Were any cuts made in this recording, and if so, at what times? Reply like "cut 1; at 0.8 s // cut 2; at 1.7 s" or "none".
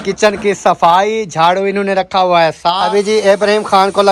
cut 1; at 2.8 s